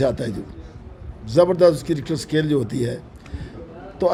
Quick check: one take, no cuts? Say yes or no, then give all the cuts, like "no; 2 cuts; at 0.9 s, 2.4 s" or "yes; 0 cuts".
yes; 0 cuts